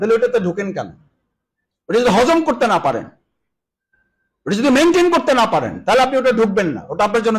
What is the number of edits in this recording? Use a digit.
0